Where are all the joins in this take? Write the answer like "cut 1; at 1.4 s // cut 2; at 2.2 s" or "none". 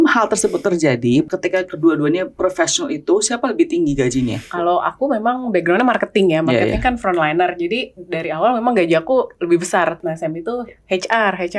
cut 1; at 1.3 s // cut 2; at 4.5 s // cut 3; at 10.0 s